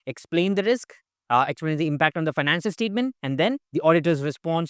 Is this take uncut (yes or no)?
no